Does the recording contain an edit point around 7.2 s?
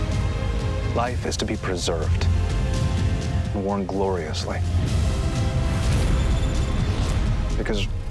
no; 0 cuts

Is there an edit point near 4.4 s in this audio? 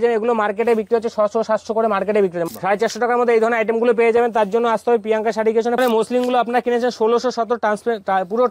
no; 2 cuts; at 2.5 s, 5.8 s

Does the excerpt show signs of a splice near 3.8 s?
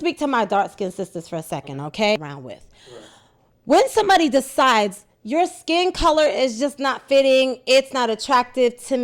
no; 1 cut; at 2.3 s

